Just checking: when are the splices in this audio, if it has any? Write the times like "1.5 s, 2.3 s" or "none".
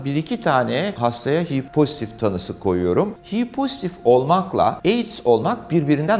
3.2 s

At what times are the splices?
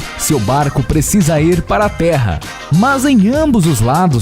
2.7 s

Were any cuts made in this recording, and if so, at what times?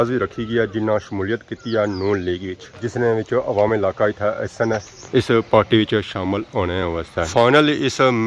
none

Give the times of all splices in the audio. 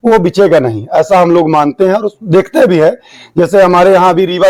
none

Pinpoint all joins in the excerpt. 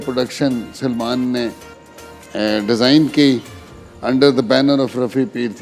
none

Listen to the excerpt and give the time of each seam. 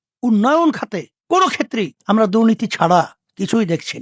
1.1 s, 2.0 s

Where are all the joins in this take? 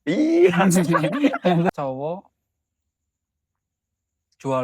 1.7 s

